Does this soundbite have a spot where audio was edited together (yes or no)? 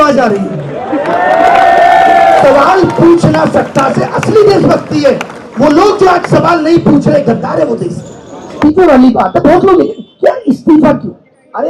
yes